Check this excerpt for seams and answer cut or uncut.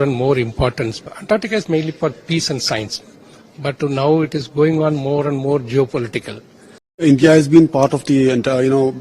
cut